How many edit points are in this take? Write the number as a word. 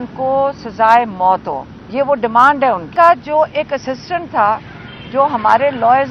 one